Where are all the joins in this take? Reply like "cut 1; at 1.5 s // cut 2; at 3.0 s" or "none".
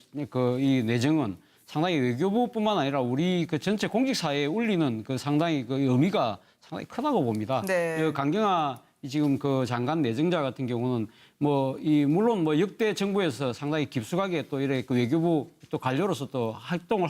cut 1; at 12.1 s